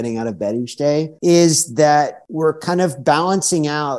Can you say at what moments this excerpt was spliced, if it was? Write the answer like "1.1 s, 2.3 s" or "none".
1.1 s, 2.2 s